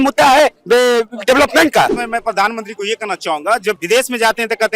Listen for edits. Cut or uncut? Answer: cut